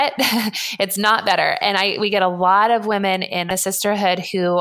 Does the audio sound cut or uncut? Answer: cut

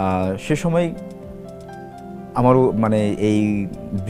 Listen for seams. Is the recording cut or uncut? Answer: uncut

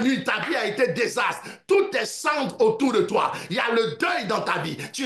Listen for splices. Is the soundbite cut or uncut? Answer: uncut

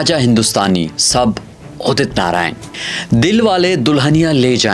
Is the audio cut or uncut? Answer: cut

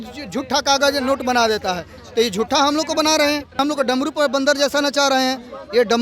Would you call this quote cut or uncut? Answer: cut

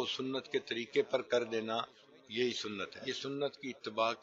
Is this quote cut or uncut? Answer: cut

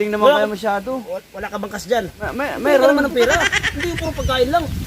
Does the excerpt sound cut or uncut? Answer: cut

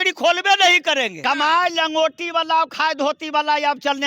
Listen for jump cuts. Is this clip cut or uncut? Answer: cut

